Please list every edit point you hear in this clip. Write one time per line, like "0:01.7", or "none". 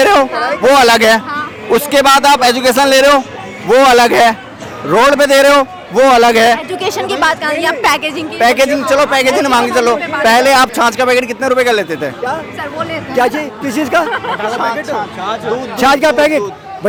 none